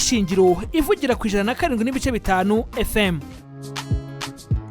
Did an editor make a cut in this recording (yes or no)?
yes